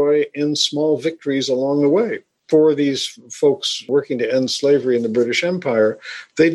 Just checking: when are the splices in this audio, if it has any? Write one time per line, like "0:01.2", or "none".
0:02.4
0:03.9